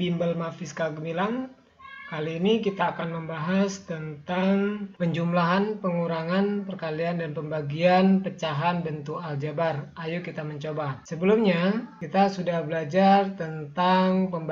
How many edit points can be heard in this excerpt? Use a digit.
3